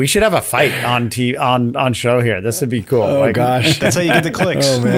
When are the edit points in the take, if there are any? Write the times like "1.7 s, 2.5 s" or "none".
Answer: none